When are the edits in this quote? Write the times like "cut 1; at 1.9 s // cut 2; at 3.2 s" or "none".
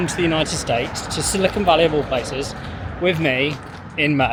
none